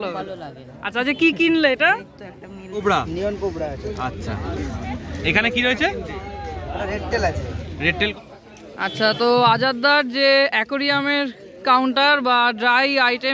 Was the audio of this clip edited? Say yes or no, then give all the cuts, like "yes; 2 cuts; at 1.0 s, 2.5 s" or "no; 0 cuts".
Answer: yes; 2 cuts; at 2.8 s, 8.1 s